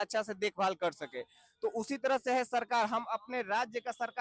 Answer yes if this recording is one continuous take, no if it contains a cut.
yes